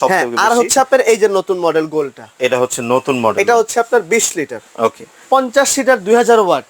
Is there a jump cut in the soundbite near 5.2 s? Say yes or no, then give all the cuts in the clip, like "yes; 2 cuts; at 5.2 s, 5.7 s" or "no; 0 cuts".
yes; 1 cut; at 5.2 s